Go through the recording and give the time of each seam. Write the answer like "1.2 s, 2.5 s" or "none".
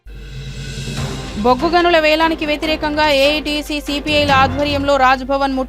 1.1 s